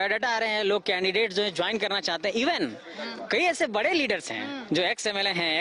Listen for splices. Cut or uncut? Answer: uncut